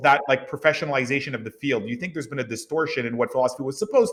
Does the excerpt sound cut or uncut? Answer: uncut